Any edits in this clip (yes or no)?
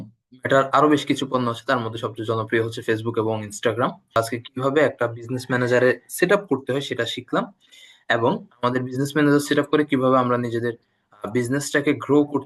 yes